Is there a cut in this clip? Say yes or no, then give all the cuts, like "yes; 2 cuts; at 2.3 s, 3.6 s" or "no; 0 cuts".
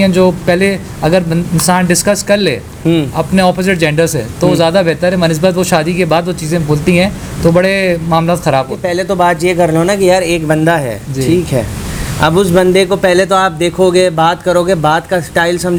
no; 0 cuts